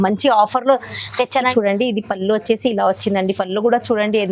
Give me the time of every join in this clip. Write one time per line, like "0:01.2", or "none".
0:01.5